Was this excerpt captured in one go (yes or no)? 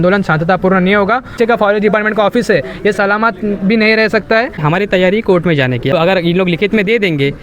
no